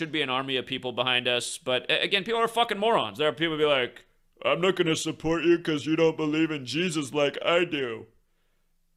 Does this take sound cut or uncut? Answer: uncut